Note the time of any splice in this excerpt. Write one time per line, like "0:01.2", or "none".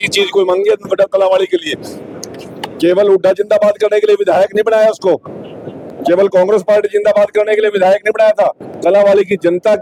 none